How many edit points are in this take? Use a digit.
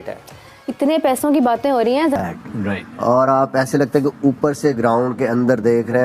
1